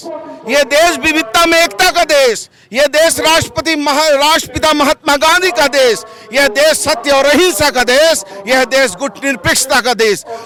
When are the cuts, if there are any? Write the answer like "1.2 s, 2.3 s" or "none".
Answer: none